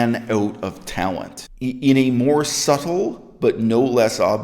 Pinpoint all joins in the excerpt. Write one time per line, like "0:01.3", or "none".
0:01.4